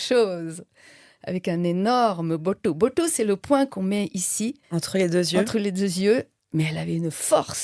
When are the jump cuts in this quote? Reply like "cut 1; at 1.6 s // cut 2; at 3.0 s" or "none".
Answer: cut 1; at 4.6 s // cut 2; at 6.4 s